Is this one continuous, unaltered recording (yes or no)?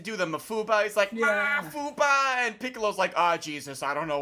yes